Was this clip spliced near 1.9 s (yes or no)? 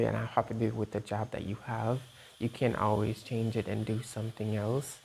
no